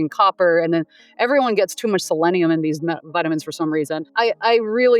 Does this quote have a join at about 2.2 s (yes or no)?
no